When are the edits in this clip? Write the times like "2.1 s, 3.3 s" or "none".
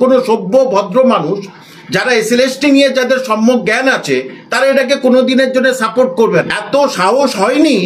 6.6 s